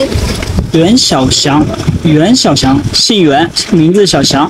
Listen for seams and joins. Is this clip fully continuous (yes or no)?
yes